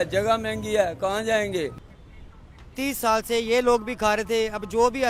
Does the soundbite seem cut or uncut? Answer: uncut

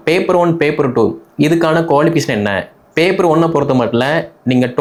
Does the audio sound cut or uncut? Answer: uncut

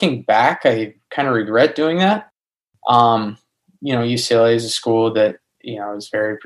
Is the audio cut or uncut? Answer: uncut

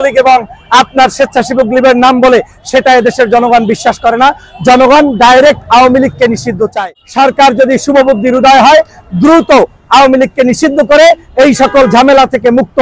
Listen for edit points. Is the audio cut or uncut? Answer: cut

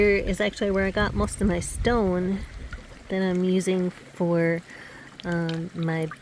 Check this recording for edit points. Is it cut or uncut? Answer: uncut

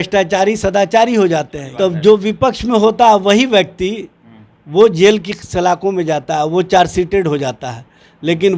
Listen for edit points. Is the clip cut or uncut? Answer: cut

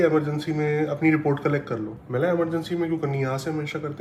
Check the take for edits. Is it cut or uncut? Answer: uncut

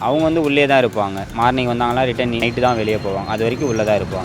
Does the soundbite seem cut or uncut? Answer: cut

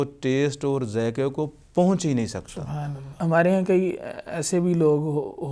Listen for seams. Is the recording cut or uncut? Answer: cut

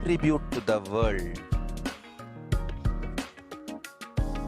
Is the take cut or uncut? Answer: cut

